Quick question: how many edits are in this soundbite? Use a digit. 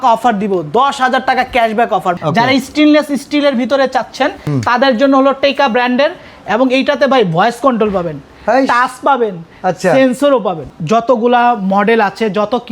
3